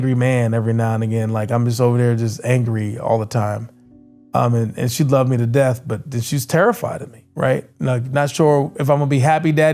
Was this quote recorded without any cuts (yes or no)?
yes